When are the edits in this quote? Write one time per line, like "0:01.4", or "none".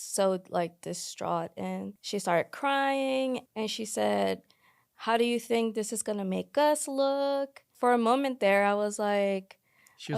0:02.0
0:03.4
0:07.6